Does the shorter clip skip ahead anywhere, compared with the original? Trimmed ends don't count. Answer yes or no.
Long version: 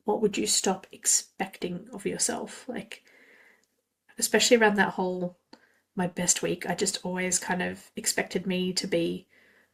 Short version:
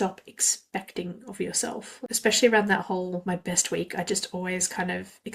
yes